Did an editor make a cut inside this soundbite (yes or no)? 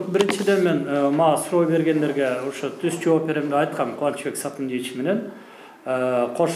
no